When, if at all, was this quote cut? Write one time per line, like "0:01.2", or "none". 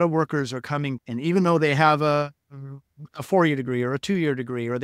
0:01.0